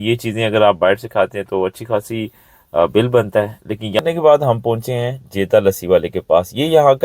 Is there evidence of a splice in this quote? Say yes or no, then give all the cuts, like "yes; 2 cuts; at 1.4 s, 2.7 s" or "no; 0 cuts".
yes; 1 cut; at 4.0 s